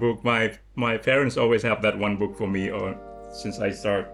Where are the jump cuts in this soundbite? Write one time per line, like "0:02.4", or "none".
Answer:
none